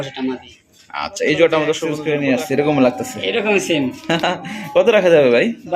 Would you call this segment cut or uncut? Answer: cut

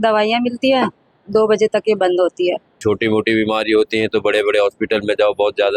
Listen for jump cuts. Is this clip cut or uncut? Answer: cut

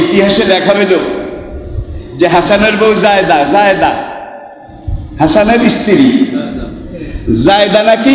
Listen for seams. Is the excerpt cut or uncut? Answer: uncut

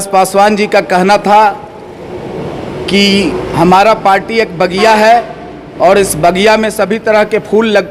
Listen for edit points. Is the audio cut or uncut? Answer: uncut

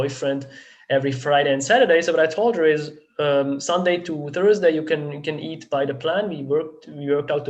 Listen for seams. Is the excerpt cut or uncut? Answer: uncut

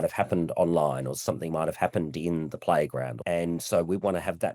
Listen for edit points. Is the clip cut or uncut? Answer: cut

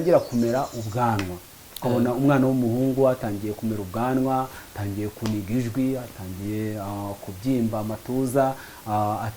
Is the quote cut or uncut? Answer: uncut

